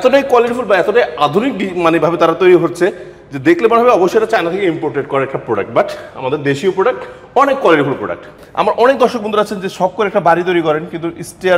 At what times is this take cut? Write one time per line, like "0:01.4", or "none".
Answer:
0:08.4